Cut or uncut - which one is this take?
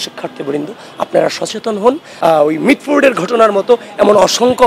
cut